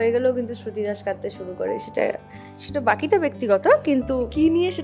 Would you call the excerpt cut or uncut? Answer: uncut